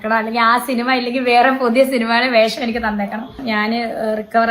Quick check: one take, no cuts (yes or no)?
no